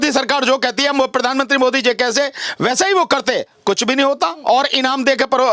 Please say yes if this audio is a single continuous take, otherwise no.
yes